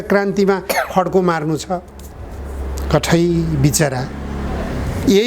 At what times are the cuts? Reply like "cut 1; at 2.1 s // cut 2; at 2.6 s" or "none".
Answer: none